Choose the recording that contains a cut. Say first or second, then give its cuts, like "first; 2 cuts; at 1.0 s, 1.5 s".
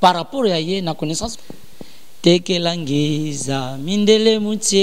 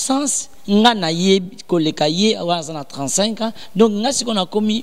first; 1 cut; at 1.3 s